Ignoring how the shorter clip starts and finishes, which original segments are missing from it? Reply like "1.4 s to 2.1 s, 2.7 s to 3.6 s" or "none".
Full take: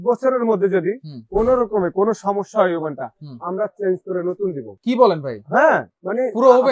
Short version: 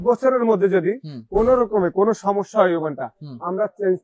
none